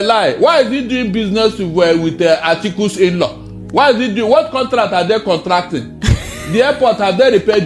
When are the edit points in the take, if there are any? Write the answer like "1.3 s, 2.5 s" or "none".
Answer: none